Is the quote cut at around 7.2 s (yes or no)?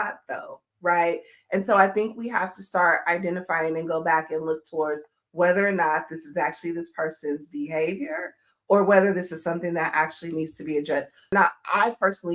no